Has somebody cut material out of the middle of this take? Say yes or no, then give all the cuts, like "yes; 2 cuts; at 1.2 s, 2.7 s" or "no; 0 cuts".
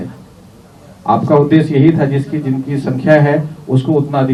no; 0 cuts